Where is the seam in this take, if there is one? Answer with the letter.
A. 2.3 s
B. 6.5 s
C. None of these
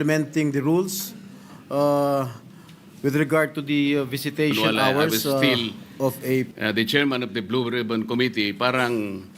B